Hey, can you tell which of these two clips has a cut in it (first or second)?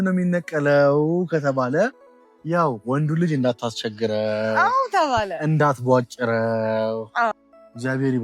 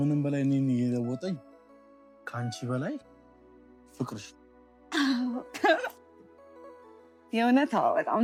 first